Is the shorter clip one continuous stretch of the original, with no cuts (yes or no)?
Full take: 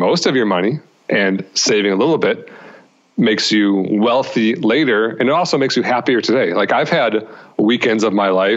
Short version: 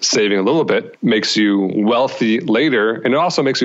no